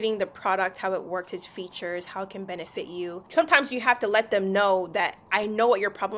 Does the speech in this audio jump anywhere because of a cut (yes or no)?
yes